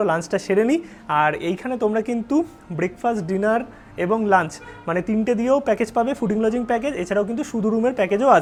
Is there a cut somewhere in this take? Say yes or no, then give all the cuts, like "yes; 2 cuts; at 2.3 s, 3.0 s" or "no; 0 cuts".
no; 0 cuts